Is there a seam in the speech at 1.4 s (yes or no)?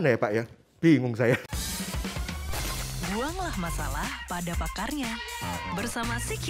yes